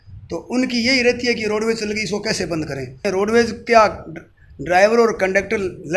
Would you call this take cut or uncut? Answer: cut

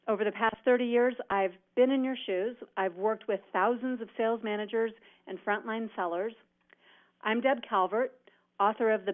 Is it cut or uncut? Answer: cut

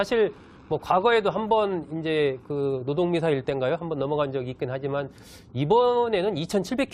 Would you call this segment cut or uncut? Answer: uncut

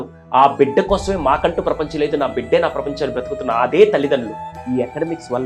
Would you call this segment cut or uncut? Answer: cut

